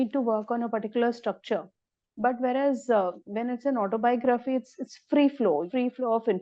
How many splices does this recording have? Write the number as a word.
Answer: zero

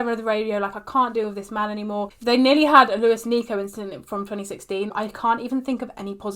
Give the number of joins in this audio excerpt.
two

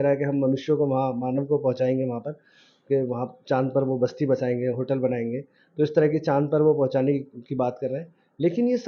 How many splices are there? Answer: zero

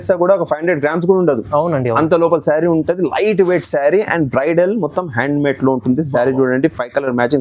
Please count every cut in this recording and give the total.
zero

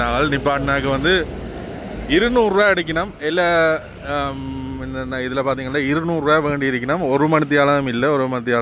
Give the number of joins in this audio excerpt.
zero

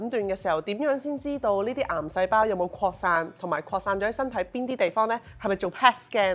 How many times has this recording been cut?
zero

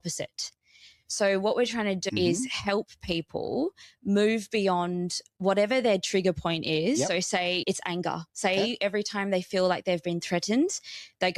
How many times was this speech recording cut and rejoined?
two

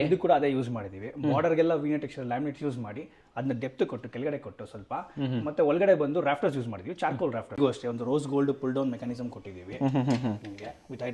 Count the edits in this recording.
one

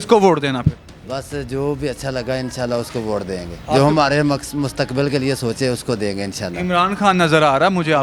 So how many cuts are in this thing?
one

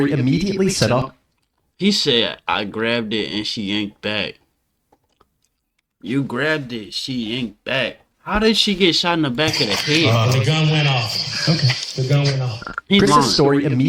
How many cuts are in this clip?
zero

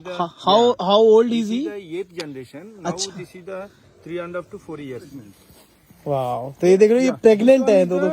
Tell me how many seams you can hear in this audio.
one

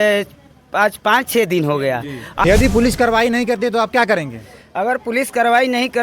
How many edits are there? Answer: one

